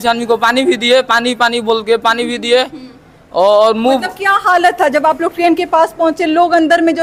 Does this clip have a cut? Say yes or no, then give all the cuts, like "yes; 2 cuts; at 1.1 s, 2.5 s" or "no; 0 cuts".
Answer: no; 0 cuts